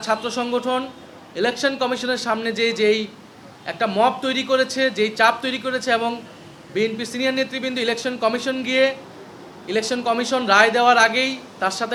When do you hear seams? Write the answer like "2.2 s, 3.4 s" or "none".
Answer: none